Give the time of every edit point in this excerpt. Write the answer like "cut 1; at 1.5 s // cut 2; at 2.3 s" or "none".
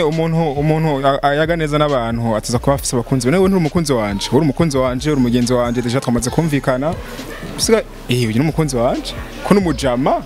none

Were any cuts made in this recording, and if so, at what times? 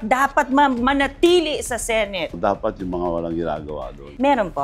cut 1; at 2.3 s

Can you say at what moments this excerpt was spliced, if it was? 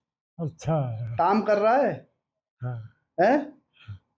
none

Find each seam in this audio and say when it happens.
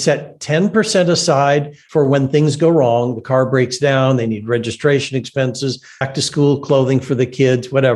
cut 1; at 1.8 s // cut 2; at 6.1 s

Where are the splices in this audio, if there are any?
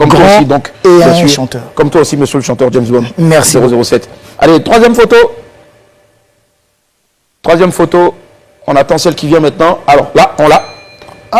none

